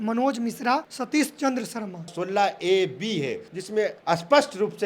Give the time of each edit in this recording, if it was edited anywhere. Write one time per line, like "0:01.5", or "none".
0:00.9
0:02.2
0:03.7